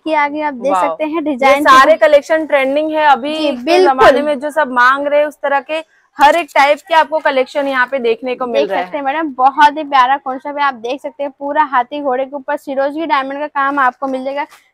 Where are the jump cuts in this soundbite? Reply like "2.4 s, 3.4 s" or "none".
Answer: none